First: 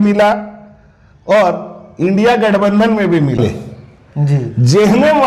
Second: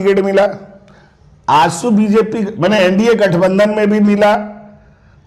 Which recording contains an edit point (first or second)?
first